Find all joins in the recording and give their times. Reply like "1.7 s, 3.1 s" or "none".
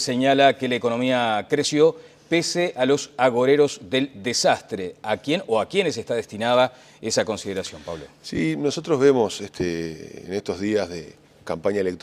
none